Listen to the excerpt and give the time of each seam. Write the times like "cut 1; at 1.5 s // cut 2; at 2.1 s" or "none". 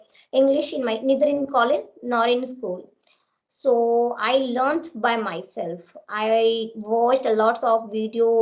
none